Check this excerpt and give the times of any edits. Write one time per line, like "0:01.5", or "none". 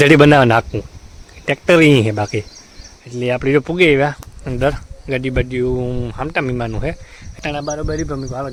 none